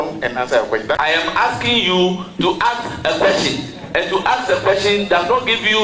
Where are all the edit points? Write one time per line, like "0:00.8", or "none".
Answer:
0:01.1